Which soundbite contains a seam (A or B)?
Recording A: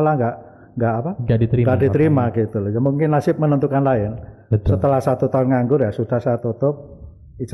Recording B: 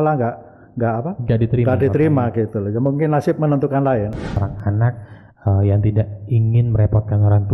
B